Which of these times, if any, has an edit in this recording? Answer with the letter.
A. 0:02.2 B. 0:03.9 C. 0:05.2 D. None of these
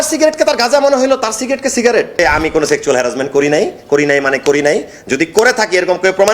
A